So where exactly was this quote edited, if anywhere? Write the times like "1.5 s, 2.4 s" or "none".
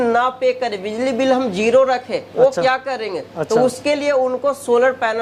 none